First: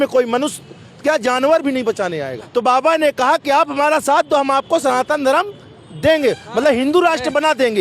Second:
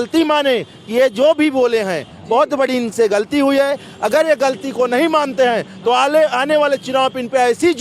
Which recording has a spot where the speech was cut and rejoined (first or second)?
first